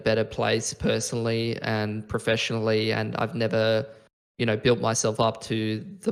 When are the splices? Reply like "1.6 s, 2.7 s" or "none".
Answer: none